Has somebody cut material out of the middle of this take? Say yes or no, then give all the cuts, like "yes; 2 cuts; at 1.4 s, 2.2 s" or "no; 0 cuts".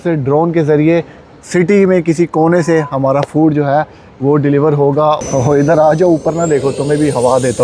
yes; 1 cut; at 5.2 s